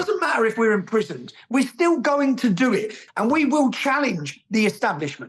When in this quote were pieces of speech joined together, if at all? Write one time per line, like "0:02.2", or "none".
0:03.0